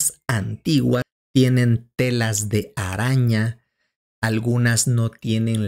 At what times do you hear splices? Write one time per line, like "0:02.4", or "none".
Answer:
0:01.1